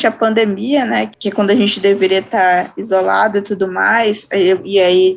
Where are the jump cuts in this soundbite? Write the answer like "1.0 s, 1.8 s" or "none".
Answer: 1.1 s